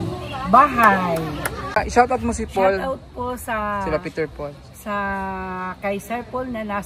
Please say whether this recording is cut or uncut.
cut